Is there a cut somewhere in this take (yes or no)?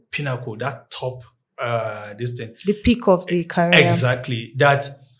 no